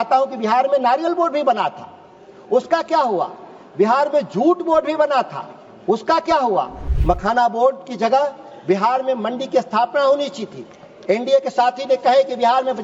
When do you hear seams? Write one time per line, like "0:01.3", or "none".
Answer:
0:06.8